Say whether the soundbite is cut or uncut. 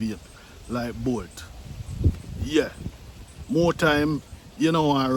uncut